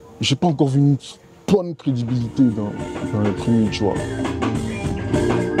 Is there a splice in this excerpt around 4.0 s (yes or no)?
yes